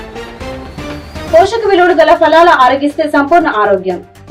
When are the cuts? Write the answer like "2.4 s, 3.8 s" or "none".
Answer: none